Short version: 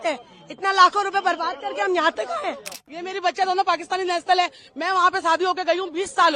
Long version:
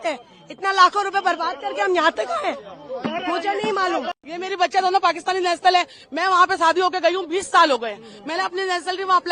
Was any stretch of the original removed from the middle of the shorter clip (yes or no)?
yes